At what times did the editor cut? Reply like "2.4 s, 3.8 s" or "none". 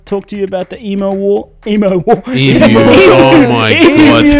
none